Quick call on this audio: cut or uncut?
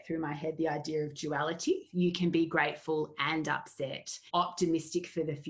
cut